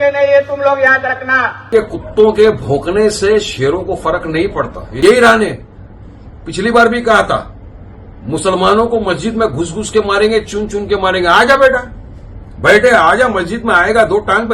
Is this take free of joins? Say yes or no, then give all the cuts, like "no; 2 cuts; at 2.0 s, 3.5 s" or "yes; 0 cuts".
no; 2 cuts; at 1.7 s, 4.8 s